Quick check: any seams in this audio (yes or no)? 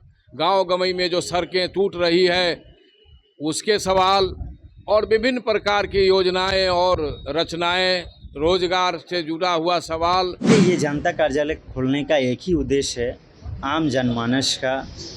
yes